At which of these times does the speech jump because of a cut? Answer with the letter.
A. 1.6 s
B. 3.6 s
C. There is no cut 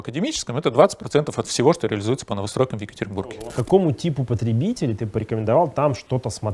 B